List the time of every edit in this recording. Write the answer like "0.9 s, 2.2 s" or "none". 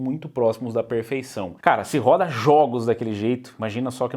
1.5 s